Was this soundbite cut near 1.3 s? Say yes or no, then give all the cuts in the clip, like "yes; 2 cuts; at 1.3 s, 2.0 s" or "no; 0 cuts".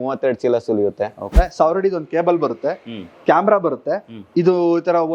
yes; 1 cut; at 1.3 s